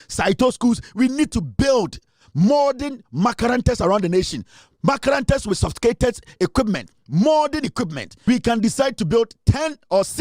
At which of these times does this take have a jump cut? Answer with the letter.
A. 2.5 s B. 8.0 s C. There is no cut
B